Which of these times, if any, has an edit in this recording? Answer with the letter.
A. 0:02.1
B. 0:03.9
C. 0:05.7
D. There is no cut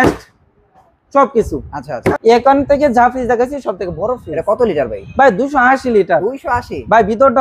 A